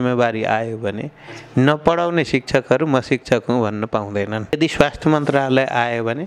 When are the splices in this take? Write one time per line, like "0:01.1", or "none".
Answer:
0:04.5